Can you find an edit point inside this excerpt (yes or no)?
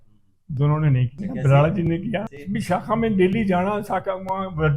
yes